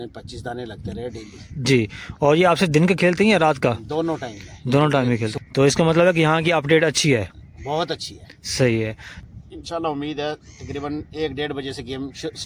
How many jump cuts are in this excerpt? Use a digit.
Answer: 2